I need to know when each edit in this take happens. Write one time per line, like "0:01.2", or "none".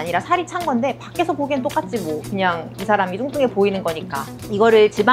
none